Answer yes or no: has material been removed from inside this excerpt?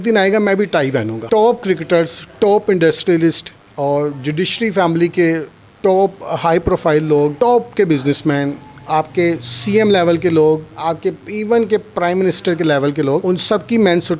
yes